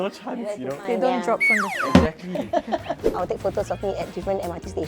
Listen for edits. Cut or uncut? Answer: cut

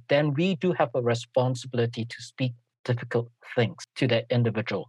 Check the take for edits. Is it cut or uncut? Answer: cut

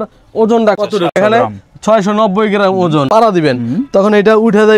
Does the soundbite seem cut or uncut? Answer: cut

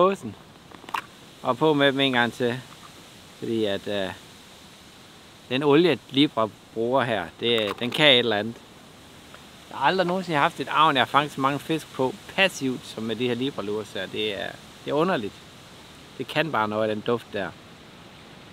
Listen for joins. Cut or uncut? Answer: uncut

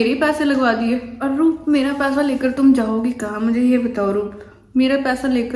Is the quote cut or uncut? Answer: cut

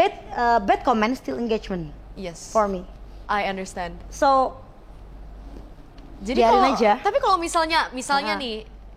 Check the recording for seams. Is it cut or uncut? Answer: uncut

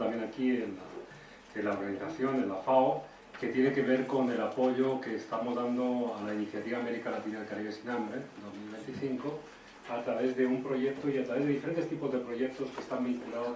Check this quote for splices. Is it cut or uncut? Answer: uncut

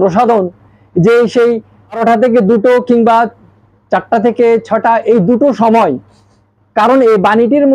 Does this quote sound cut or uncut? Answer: cut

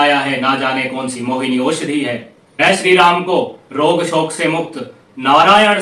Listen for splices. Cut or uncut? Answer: uncut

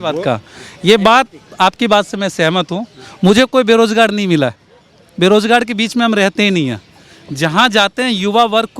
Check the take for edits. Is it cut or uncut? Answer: uncut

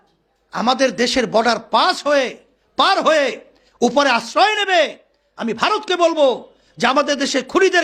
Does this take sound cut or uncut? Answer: uncut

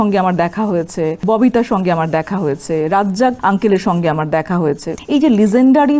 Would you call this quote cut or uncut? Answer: cut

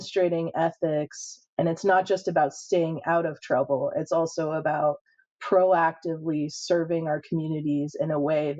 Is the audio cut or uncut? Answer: uncut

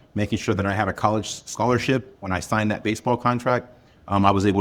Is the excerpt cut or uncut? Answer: uncut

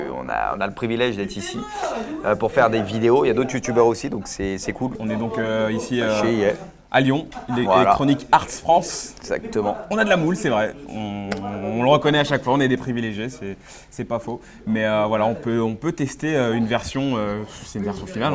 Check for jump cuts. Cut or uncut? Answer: cut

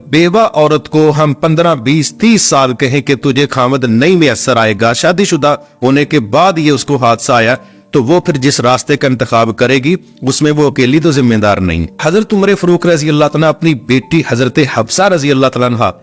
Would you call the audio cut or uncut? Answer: cut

